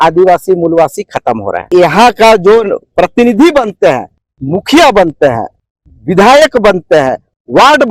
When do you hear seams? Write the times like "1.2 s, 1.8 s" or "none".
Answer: 1.7 s